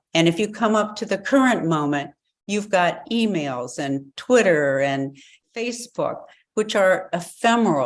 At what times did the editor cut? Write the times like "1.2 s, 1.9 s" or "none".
5.4 s

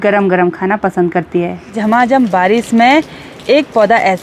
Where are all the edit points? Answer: 1.7 s

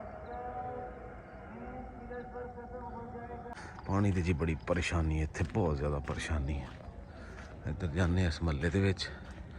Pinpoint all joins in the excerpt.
3.5 s

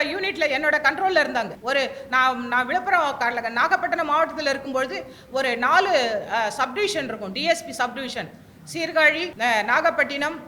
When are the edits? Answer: 1.6 s, 9.3 s

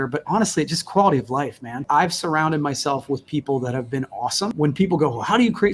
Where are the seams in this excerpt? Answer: 1.8 s, 4.5 s

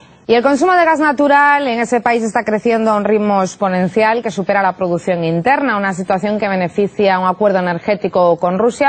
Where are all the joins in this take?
none

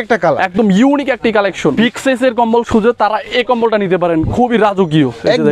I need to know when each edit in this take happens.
1.7 s

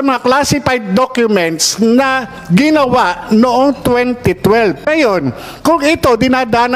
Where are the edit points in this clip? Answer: 4.8 s

